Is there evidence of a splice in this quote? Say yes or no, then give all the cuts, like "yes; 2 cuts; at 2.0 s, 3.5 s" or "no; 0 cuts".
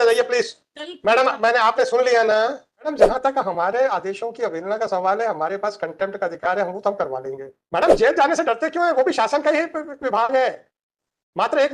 yes; 2 cuts; at 2.9 s, 7.5 s